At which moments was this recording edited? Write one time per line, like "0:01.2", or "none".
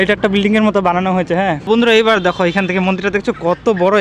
0:01.7